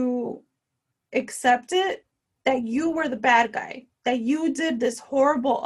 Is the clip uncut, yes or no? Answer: yes